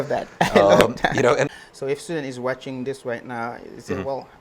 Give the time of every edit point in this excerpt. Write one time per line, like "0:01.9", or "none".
0:01.5